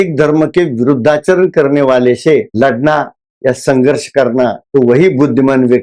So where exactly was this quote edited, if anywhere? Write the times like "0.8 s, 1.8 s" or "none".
4.6 s

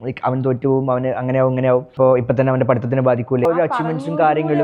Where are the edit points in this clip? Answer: 1.9 s, 3.5 s

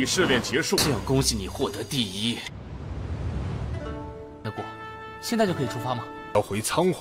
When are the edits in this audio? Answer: 2.5 s

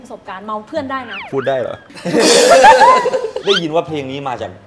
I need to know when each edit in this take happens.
1.2 s, 3.4 s

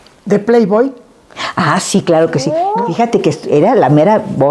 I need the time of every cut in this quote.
2.6 s

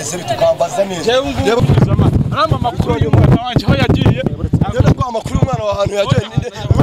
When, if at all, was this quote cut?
1.6 s

